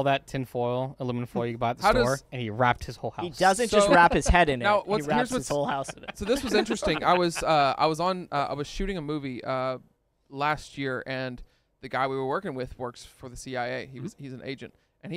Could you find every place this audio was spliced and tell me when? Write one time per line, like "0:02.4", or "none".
none